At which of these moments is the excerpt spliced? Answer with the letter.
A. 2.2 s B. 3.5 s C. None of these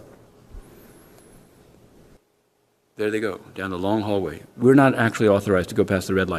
A